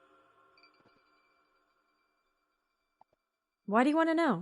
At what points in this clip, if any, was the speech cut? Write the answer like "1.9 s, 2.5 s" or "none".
3.3 s